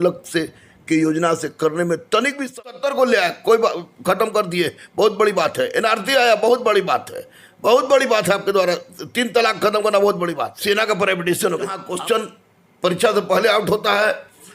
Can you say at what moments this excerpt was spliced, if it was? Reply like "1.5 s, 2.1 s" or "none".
2.6 s, 10.5 s, 11.8 s